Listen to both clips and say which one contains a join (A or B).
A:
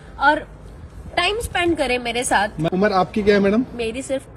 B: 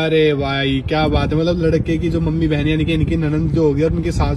A